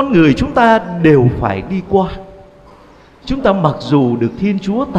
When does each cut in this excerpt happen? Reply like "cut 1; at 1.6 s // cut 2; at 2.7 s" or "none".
none

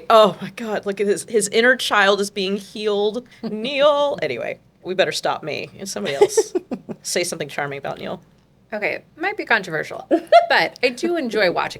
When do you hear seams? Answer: cut 1; at 3.3 s // cut 2; at 4.5 s // cut 3; at 6.9 s // cut 4; at 8.9 s

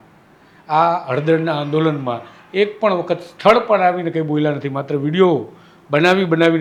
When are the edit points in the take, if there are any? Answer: none

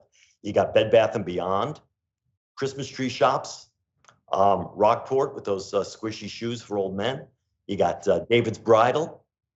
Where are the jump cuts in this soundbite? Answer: none

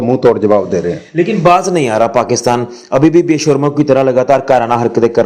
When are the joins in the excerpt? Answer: none

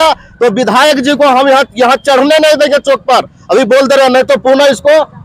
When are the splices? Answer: none

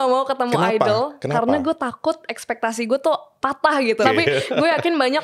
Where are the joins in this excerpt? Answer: cut 1; at 4.0 s

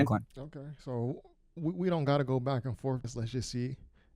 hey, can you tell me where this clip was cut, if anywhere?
cut 1; at 3.1 s

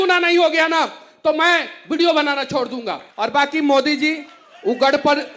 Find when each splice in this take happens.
cut 1; at 3.0 s

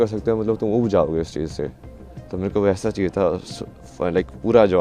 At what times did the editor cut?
none

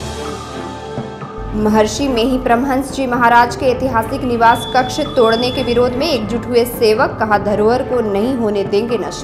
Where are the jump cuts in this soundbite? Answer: cut 1; at 1.2 s

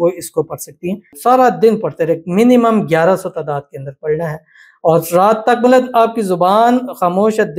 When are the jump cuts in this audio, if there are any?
cut 1; at 1.1 s

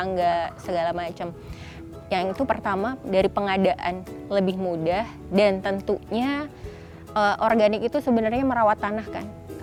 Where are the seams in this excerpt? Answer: none

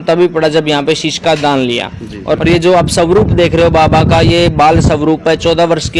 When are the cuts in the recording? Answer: cut 1; at 2.4 s

